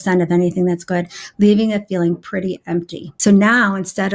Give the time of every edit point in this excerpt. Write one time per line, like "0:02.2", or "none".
0:03.0